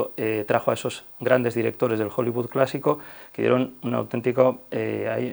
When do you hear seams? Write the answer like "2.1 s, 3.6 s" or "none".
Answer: none